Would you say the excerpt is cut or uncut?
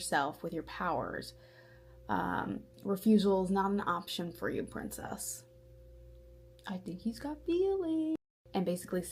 cut